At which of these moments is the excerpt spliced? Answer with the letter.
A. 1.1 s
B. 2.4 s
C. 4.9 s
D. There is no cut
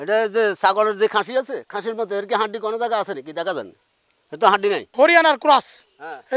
C